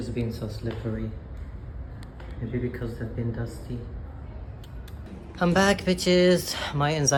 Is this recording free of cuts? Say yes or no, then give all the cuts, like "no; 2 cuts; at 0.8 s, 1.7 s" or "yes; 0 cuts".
yes; 0 cuts